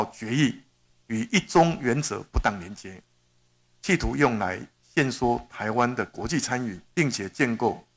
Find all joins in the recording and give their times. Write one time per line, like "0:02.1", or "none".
0:06.8